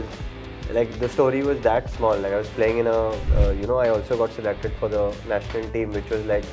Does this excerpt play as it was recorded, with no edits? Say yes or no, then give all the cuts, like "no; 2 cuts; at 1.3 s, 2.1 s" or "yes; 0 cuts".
no; 1 cut; at 3.2 s